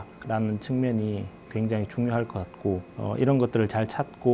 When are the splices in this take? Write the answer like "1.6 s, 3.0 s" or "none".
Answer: none